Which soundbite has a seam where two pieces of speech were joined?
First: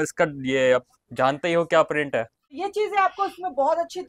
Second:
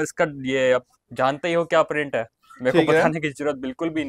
first; 1 cut; at 2.4 s

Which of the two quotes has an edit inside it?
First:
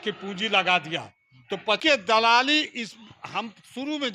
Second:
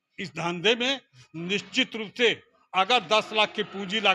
first; 1 cut; at 1.8 s

